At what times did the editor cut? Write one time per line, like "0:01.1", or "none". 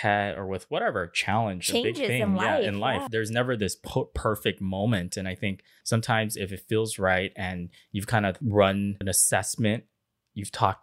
0:03.1
0:05.7
0:08.4
0:09.0